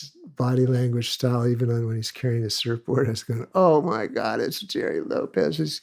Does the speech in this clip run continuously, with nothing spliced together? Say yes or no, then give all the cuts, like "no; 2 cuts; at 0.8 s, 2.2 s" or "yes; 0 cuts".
yes; 0 cuts